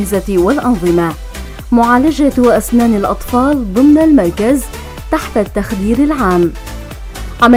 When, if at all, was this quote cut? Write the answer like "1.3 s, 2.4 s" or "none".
none